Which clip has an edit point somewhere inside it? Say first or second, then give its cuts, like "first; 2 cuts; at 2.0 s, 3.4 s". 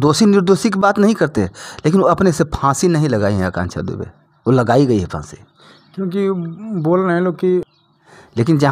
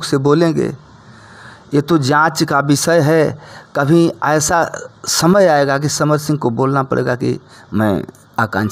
first; 1 cut; at 7.7 s